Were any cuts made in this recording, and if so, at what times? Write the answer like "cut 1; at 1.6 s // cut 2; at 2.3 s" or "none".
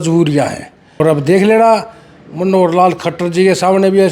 cut 1; at 1.1 s